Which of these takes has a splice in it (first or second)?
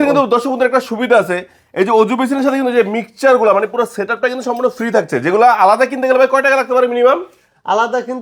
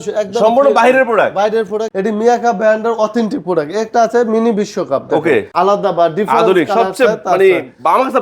second